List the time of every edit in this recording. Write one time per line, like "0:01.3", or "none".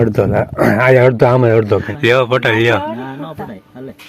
0:01.9